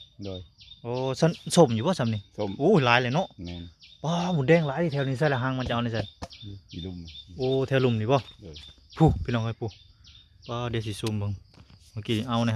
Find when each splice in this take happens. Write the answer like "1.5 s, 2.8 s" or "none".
none